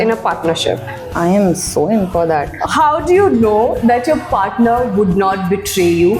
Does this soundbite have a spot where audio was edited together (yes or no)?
no